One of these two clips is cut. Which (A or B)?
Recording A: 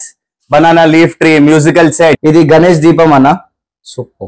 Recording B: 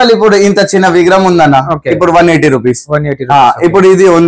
A